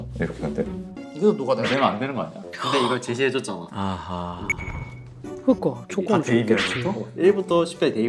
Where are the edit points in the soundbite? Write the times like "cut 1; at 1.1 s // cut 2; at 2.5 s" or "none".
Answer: cut 1; at 0.9 s